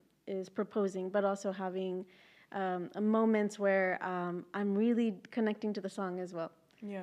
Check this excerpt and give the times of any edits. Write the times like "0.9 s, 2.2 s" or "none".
none